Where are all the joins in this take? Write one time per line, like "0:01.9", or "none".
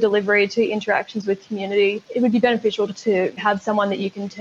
0:02.0
0:03.2